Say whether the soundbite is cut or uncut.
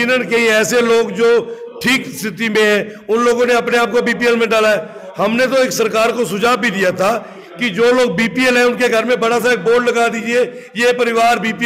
uncut